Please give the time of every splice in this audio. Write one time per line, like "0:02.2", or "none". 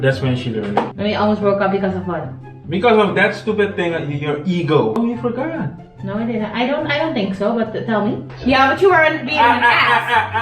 0:00.9
0:05.0
0:08.3